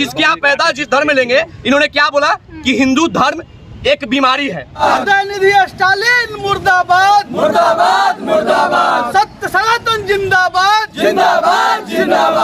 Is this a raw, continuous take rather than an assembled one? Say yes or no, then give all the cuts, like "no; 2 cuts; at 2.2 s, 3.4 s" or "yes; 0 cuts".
no; 1 cut; at 4.8 s